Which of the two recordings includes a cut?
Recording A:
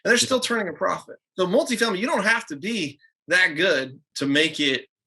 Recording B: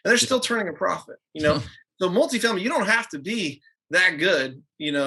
A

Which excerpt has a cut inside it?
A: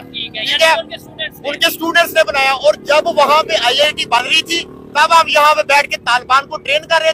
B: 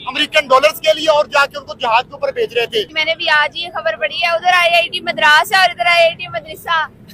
B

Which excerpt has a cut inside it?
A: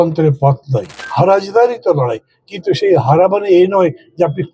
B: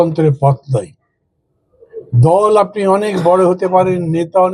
A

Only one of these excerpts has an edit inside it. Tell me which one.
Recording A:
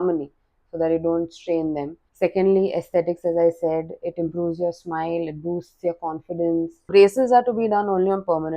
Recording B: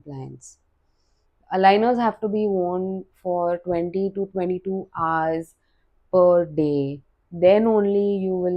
A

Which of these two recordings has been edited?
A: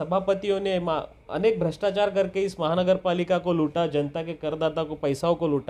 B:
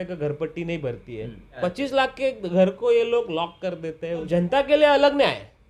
B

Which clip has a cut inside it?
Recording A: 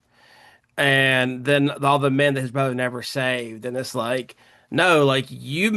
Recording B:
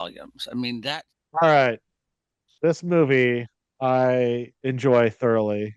B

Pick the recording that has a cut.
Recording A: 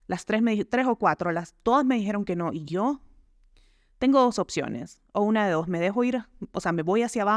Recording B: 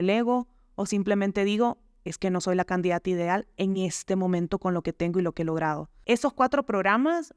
B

